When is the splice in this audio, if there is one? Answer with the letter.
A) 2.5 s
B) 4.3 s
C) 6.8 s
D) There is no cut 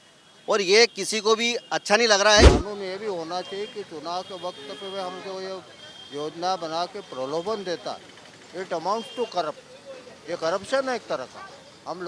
A